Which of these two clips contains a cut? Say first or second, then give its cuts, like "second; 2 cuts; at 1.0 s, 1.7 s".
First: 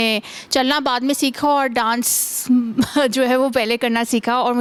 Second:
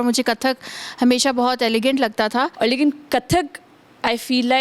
second; 1 cut; at 2.5 s